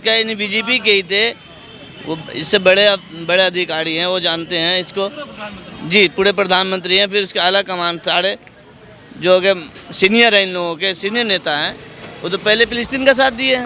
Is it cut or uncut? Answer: uncut